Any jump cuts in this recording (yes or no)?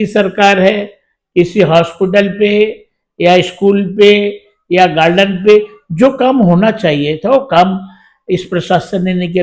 no